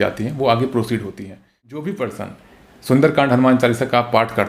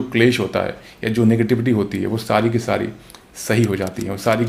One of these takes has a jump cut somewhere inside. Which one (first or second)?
first